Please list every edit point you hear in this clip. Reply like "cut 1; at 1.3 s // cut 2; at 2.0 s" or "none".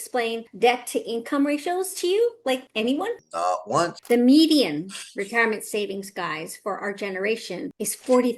cut 1; at 4.0 s

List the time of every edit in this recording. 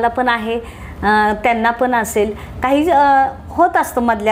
none

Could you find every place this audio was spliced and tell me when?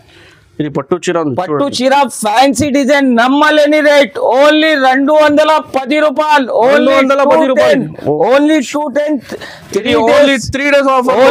none

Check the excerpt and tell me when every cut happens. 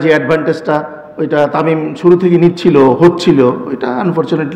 none

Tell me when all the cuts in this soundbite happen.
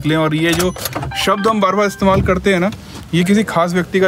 none

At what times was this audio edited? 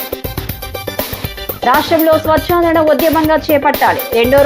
cut 1; at 0.9 s

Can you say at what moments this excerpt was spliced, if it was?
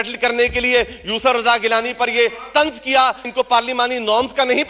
cut 1; at 3.3 s

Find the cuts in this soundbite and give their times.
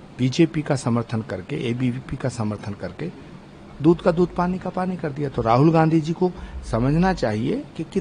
none

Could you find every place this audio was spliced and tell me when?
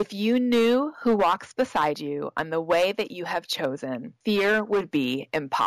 cut 1; at 4.1 s

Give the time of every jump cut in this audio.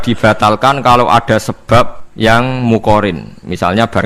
cut 1; at 2.0 s

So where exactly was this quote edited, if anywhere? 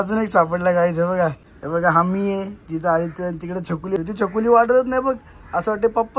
cut 1; at 1.5 s // cut 2; at 4.0 s

